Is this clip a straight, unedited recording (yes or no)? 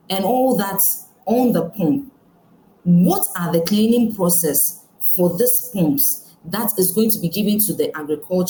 yes